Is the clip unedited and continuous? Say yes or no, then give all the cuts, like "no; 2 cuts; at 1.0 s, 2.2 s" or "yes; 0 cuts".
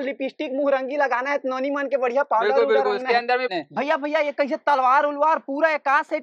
no; 1 cut; at 3.5 s